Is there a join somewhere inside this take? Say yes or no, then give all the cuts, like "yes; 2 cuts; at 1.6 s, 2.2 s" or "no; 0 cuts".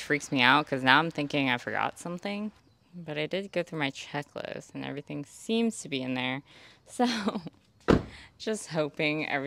no; 0 cuts